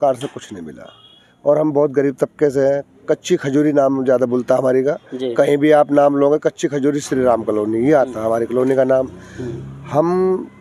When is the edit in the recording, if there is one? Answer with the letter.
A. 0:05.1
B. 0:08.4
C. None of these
C